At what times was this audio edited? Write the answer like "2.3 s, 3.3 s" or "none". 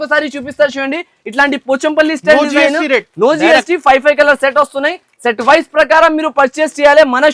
none

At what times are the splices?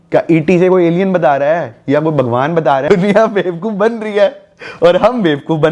2.9 s

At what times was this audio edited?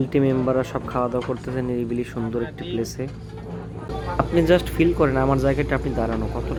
none

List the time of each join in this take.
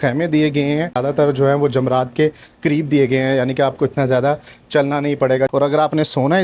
1.0 s, 5.5 s

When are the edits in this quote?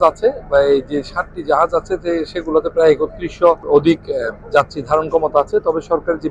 3.6 s

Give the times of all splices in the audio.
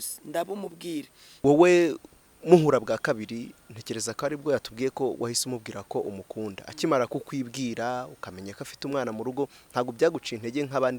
1.4 s

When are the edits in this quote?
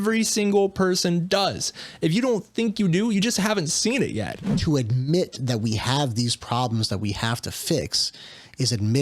4.4 s

